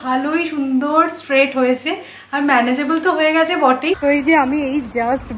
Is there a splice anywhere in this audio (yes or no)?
yes